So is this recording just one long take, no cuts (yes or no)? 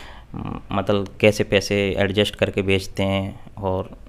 yes